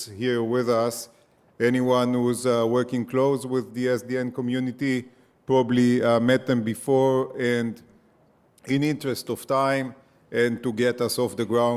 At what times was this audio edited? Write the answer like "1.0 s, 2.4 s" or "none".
7.7 s